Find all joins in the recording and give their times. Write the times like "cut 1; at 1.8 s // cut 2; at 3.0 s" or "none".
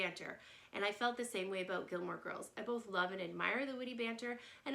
none